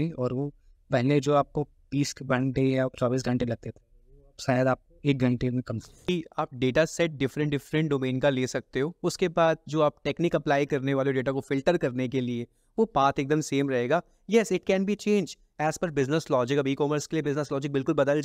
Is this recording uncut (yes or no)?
no